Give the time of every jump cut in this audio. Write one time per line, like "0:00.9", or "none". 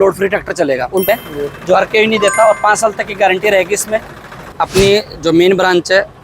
0:01.1
0:04.4